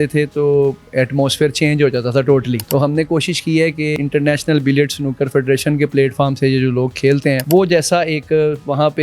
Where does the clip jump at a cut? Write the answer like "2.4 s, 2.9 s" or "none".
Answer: 2.6 s, 3.9 s, 7.4 s